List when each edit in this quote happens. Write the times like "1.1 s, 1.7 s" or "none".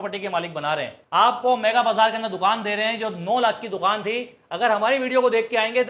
1.0 s